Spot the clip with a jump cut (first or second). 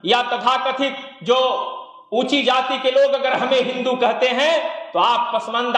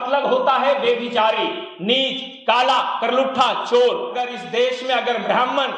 second